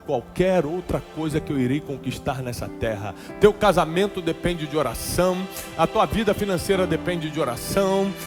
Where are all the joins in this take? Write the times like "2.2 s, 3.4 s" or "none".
none